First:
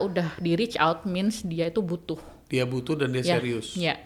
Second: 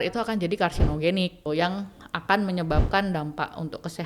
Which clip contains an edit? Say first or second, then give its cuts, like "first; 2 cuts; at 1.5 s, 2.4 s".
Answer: second; 1 cut; at 1.4 s